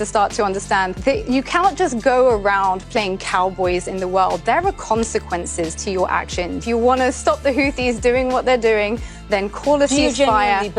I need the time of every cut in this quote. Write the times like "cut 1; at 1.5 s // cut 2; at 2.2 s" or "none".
cut 1; at 0.9 s // cut 2; at 6.6 s